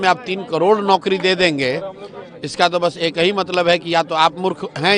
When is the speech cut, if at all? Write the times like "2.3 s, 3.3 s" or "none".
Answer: none